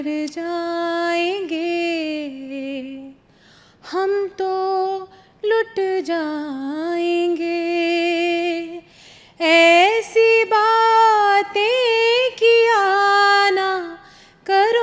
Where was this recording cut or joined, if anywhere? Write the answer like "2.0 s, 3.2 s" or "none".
none